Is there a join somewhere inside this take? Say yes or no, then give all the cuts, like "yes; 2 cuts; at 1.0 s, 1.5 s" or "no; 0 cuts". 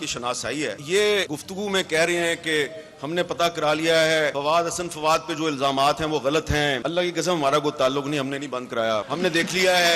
yes; 5 cuts; at 0.8 s, 1.4 s, 4.4 s, 6.8 s, 9.1 s